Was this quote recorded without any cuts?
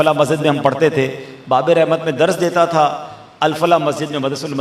yes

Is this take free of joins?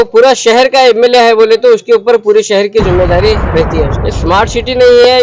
no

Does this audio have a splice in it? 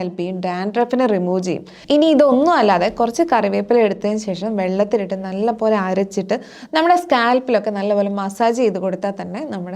yes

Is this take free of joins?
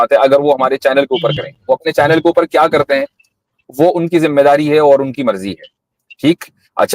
yes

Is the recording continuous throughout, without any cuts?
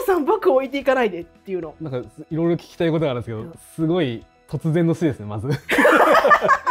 no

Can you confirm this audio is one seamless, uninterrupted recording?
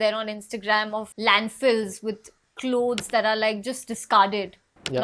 no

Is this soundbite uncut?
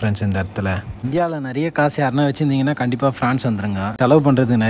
no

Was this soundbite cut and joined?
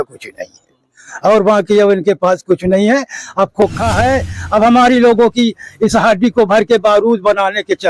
no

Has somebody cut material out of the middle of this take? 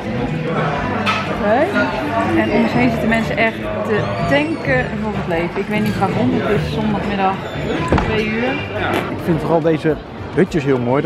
yes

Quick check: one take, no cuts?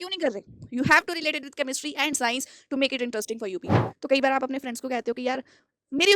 no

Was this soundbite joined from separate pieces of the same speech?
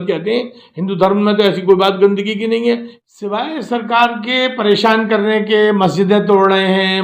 yes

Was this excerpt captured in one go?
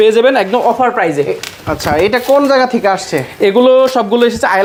yes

